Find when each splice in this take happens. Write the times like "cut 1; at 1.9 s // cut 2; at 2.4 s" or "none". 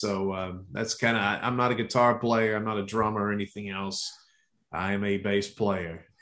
none